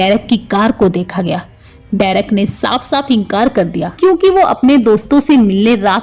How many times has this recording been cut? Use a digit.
1